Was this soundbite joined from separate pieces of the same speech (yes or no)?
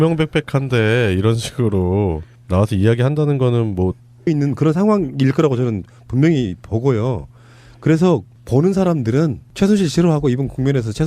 no